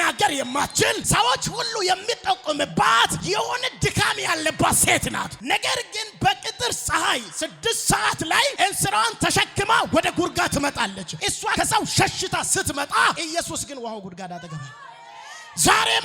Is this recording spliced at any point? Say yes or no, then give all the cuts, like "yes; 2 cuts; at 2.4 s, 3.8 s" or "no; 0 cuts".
no; 0 cuts